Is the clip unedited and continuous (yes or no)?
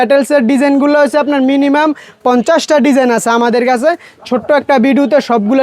yes